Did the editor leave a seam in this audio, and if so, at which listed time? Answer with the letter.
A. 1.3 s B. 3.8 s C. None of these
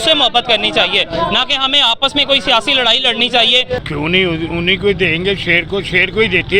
B